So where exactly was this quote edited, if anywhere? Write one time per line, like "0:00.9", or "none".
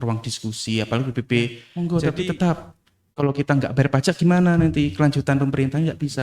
0:01.6